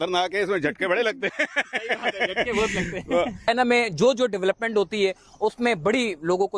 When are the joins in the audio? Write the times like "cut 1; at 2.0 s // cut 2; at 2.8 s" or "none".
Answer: cut 1; at 3.5 s